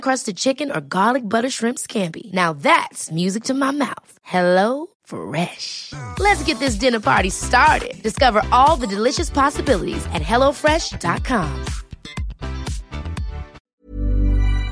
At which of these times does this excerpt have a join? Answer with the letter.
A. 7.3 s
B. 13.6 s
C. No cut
B